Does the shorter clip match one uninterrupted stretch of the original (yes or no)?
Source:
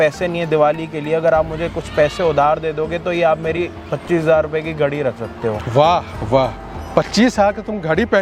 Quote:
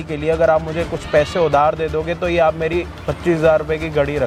yes